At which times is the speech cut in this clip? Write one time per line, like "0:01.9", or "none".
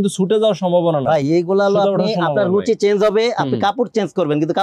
none